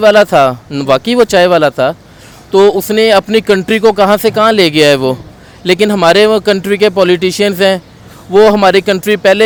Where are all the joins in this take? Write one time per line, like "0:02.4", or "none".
none